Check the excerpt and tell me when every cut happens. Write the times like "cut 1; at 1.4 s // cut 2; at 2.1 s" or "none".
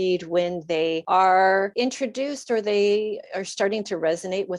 cut 1; at 1.0 s // cut 2; at 1.7 s

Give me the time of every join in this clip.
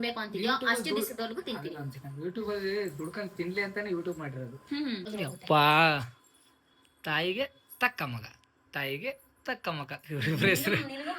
cut 1; at 5.1 s

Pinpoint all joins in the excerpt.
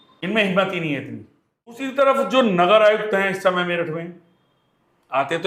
cut 1; at 1.9 s

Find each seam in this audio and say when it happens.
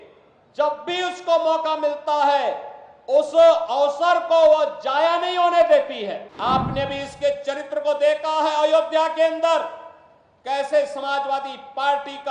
cut 1; at 6.3 s

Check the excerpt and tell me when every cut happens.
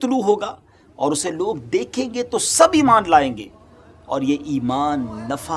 none

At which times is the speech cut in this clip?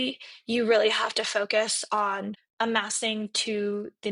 cut 1; at 2.4 s

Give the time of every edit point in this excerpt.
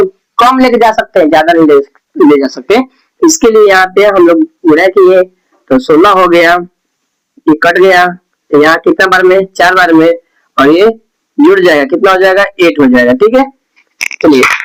none

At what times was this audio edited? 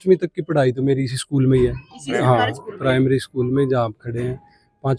none

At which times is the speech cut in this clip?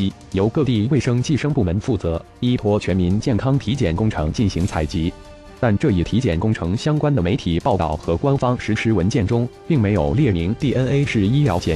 none

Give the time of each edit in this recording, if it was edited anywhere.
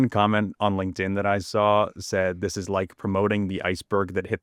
none

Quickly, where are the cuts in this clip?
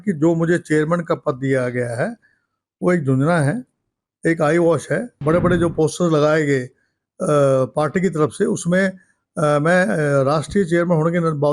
cut 1; at 5.1 s

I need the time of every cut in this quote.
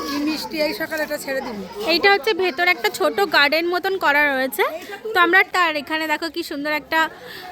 cut 1; at 5.5 s

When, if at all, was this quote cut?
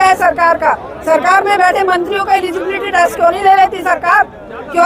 none

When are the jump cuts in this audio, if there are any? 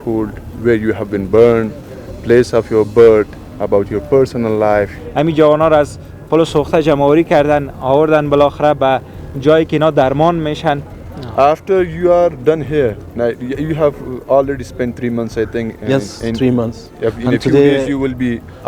cut 1; at 5.0 s // cut 2; at 10.9 s

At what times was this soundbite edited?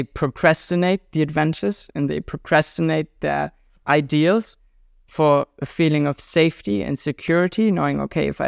none

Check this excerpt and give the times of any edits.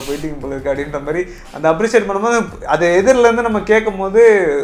none

